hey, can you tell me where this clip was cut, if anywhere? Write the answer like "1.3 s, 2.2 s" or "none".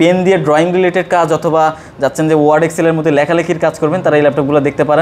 none